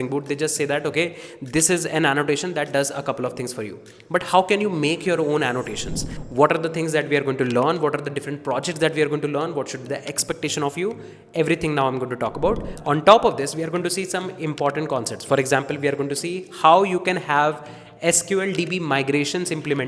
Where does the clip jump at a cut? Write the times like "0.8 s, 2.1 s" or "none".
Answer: 6.1 s, 12.7 s